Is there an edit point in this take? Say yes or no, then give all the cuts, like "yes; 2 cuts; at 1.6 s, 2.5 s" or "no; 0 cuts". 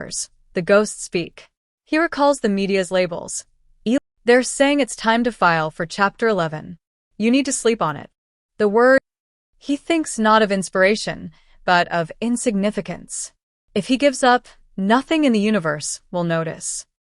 yes; 2 cuts; at 4.0 s, 9.1 s